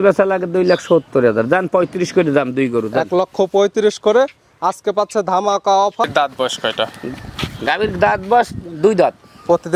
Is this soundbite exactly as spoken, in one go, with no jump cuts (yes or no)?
no